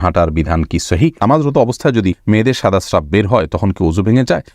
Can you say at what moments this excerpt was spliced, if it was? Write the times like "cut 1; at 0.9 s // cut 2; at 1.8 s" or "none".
cut 1; at 1.2 s // cut 2; at 2.2 s